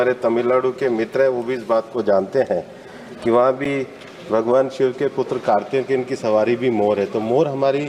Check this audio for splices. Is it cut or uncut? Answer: uncut